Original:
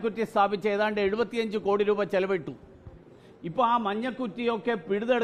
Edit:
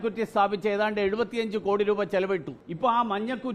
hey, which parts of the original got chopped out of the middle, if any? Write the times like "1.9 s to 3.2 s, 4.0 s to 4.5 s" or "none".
2.6 s to 3.3 s